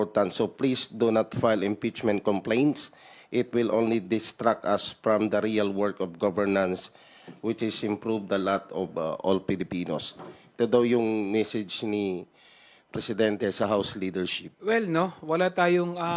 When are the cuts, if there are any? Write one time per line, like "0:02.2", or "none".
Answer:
0:14.4